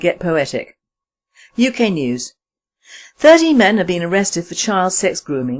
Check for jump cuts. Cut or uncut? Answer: cut